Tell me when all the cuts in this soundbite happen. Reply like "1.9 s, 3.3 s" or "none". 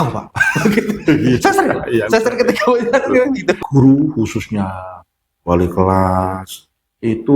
3.6 s